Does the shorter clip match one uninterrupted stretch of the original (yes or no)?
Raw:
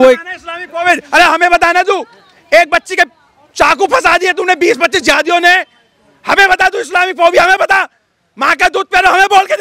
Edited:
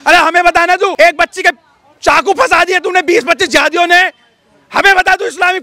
no